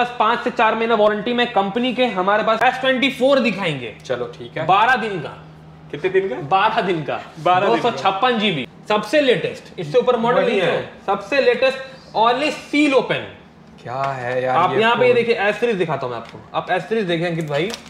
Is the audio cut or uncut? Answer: cut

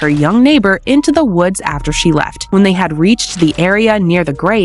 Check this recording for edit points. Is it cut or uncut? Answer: uncut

